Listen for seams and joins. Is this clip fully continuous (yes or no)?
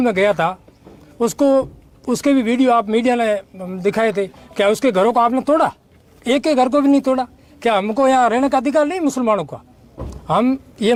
yes